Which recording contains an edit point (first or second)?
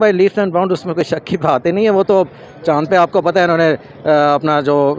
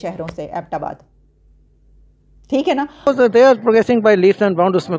second